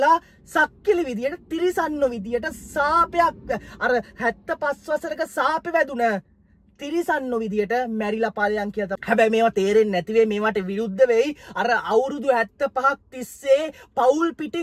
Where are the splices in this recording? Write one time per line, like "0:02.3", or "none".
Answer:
0:09.0